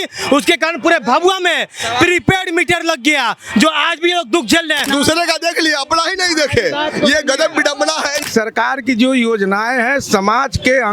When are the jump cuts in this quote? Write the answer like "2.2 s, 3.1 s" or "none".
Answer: 4.8 s, 8.2 s